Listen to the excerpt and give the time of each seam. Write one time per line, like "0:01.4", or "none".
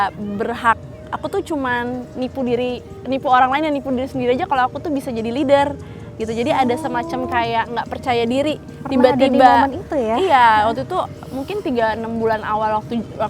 none